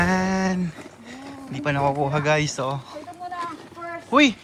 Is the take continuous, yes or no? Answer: yes